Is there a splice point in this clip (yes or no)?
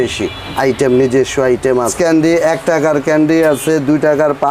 yes